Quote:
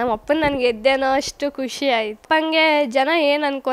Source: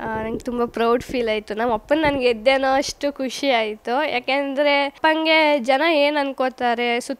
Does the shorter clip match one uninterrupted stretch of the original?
no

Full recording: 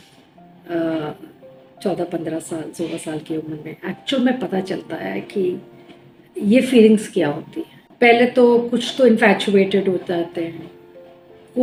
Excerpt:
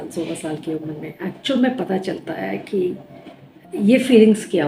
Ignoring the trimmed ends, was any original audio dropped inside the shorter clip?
no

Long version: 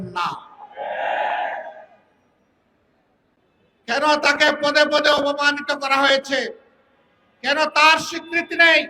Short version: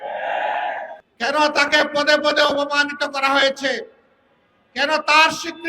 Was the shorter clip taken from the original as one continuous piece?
no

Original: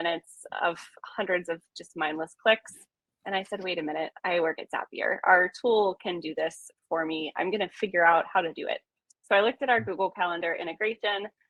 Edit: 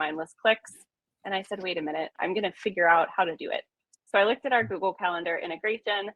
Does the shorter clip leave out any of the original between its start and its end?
yes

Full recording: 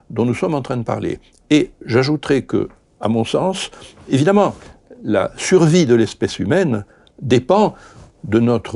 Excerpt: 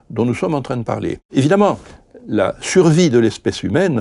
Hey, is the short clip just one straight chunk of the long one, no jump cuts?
no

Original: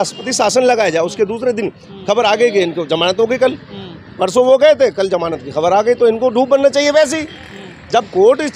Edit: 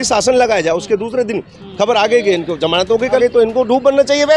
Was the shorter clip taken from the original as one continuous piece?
no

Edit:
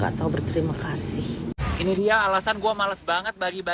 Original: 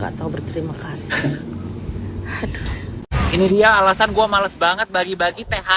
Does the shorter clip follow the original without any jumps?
no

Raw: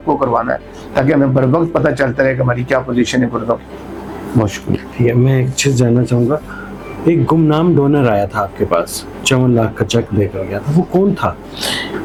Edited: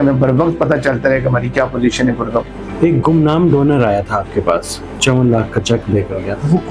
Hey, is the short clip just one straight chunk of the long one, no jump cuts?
no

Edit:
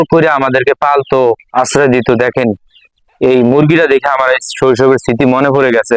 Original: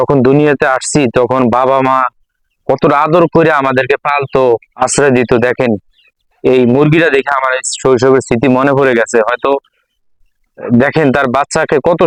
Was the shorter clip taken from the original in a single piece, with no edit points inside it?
yes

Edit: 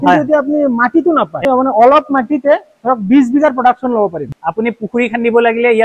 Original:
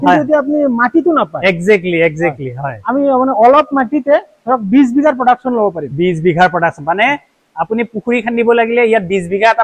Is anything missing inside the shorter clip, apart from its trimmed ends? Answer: yes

